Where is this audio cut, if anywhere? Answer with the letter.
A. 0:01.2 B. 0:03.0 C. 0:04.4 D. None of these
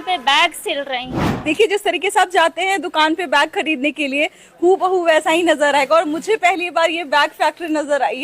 A